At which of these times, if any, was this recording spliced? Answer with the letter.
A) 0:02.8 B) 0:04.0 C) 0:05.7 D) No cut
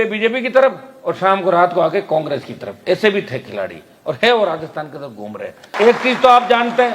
C